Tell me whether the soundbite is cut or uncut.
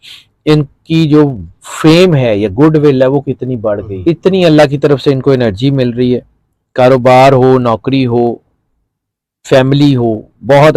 cut